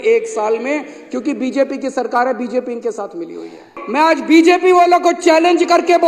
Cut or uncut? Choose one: cut